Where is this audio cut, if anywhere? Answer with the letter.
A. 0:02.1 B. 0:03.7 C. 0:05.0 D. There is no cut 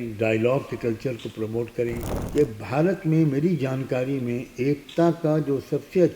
A